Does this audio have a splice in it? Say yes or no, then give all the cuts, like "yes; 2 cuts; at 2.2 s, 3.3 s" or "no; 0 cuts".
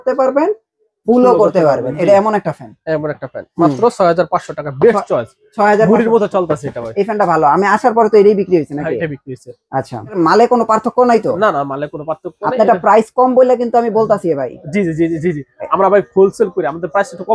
yes; 1 cut; at 10.1 s